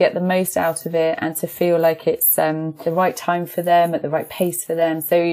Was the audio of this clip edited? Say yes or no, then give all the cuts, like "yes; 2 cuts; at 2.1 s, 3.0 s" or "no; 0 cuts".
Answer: yes; 1 cut; at 2.9 s